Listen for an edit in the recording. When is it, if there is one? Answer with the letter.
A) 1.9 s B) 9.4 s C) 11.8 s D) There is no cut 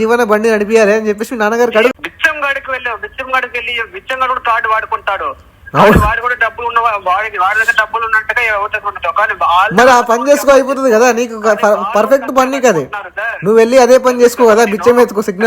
A